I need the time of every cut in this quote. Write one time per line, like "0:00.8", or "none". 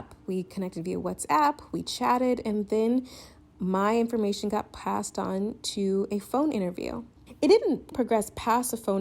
0:07.2